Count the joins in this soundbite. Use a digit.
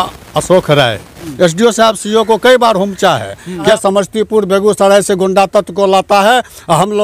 2